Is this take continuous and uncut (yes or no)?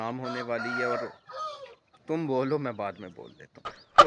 yes